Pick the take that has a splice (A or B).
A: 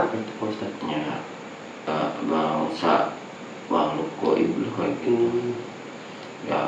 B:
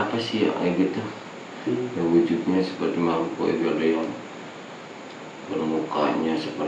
A